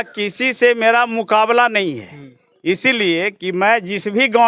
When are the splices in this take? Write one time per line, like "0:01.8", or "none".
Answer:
none